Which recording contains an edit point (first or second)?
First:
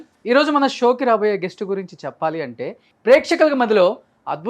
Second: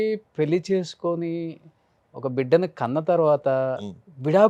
first